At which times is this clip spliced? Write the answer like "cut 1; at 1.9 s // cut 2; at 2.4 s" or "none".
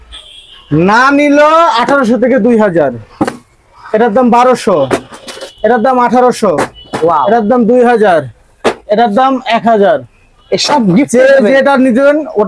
none